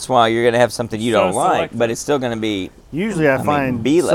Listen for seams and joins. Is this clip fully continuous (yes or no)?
yes